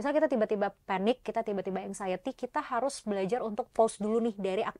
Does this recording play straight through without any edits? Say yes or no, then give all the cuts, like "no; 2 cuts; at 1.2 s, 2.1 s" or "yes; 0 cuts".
yes; 0 cuts